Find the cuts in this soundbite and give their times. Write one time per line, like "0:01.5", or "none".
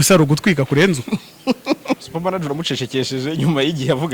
0:02.0